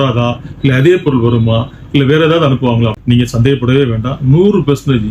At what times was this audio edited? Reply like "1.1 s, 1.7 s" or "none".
2.9 s